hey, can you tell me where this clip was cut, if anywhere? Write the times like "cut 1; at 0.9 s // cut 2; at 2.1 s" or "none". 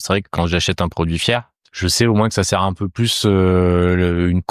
cut 1; at 1.6 s